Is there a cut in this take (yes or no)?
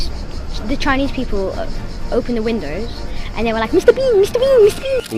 no